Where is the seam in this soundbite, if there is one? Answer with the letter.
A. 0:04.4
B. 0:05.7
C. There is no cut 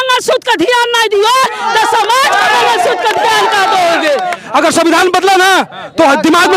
A